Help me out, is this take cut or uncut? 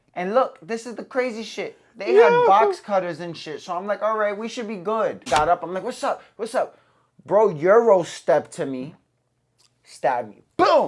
cut